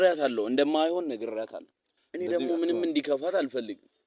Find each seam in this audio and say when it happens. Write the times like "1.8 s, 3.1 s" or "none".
2.0 s